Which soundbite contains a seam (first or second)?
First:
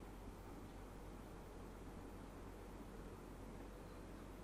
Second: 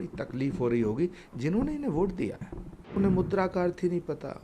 second